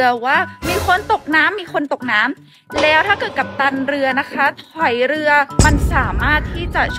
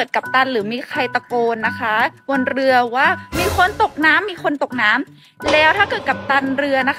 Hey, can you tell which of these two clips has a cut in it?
first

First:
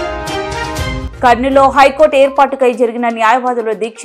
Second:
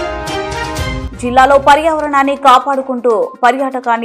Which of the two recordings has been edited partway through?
first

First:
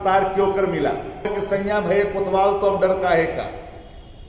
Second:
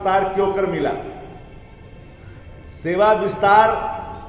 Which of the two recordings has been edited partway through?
first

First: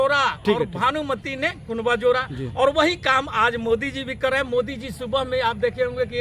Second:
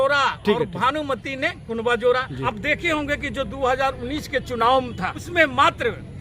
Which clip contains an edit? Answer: second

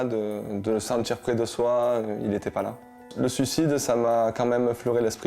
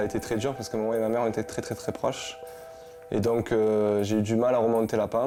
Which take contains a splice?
first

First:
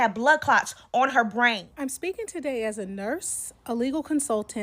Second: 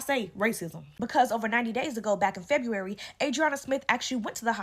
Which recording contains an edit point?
first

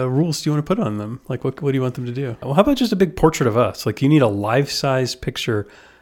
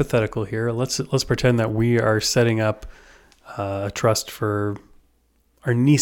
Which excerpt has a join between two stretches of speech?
first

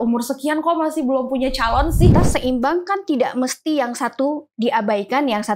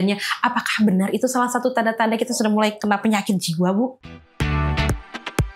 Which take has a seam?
first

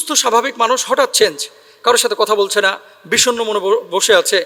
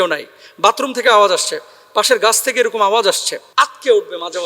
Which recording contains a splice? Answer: second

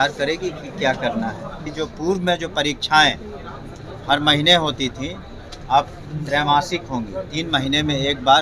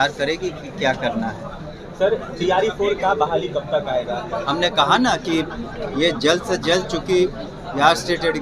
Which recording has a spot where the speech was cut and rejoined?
first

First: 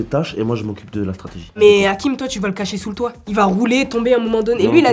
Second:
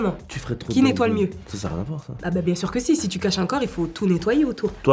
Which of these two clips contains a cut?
first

